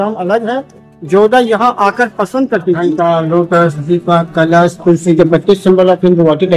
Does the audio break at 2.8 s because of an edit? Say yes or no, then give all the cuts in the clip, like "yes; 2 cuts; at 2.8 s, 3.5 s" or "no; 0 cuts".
yes; 1 cut; at 2.8 s